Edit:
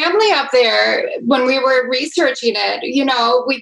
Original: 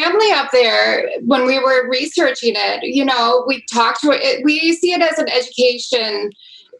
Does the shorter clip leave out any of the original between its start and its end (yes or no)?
no